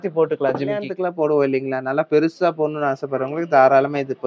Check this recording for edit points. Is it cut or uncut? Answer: cut